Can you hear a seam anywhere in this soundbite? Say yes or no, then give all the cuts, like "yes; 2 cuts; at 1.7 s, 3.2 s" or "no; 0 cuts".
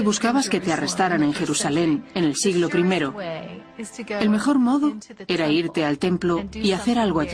yes; 1 cut; at 1.5 s